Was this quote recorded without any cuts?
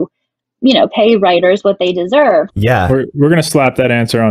no; 1 cut; at 2.5 s

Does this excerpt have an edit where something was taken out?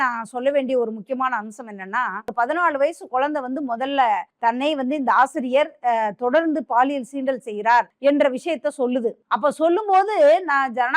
yes; 4 cuts; at 2.3 s, 4.3 s, 7.9 s, 9.2 s

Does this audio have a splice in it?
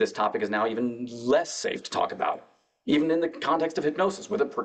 no; 0 cuts

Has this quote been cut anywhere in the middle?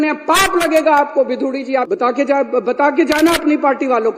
yes; 1 cut; at 1.9 s

